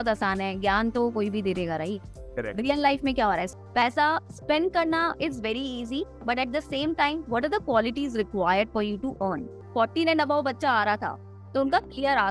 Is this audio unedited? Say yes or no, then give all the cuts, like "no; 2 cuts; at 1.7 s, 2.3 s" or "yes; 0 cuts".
no; 2 cuts; at 3.5 s, 9.5 s